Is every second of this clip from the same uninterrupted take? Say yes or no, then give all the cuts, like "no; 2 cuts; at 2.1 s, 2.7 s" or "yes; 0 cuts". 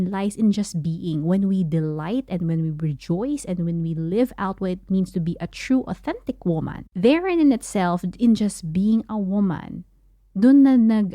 no; 1 cut; at 6.8 s